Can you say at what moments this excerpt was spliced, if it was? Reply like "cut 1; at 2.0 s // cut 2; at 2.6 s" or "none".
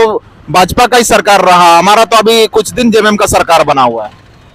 none